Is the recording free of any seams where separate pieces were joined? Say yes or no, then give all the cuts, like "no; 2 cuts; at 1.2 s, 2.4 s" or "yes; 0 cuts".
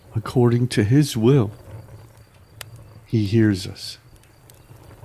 no; 3 cuts; at 1.5 s, 3.1 s, 3.8 s